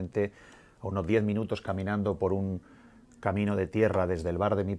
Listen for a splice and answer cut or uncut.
uncut